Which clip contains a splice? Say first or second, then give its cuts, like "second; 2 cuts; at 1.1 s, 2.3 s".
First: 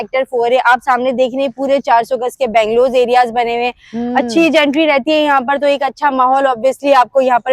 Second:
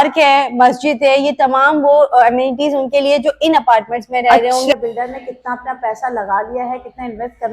second; 1 cut; at 4.7 s